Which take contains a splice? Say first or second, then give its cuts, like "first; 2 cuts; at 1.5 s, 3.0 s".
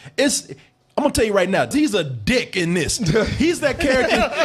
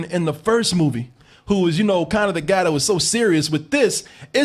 first; 1 cut; at 1.7 s